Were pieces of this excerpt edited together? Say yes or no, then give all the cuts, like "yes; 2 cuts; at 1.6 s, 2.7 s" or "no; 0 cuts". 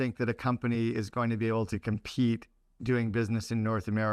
no; 0 cuts